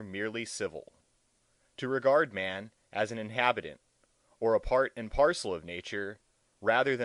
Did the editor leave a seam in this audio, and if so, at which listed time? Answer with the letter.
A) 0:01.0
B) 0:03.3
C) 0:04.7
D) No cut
D